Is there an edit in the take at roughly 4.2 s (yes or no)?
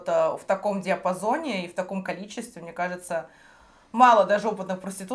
no